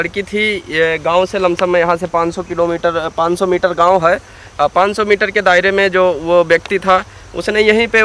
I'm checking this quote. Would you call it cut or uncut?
uncut